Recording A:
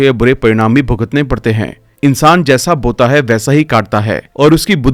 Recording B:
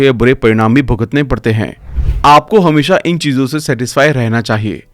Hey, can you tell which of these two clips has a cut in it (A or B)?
B